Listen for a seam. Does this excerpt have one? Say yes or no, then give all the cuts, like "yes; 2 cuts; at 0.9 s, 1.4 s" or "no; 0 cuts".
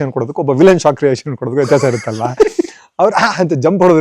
no; 0 cuts